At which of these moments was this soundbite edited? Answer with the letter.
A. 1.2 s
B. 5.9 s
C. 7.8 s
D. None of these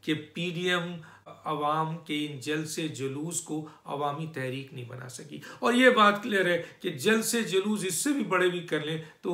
A